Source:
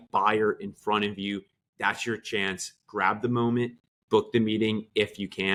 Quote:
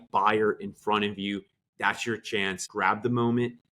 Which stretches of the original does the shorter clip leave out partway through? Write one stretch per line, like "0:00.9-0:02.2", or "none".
0:02.6-0:02.8